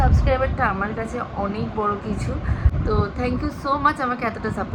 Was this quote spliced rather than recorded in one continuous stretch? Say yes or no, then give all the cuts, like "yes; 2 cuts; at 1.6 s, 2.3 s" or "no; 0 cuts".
no; 0 cuts